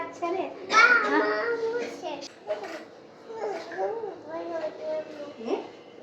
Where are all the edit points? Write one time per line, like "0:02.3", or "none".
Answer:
0:02.1